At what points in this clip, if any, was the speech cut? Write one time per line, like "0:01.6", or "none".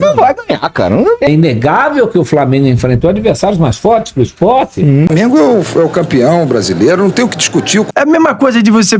0:01.3
0:05.1
0:07.9